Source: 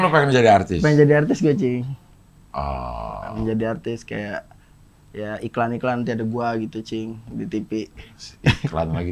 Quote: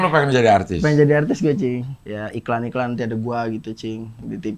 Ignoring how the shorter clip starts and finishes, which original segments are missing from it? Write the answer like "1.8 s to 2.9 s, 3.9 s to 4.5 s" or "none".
2.0 s to 5.1 s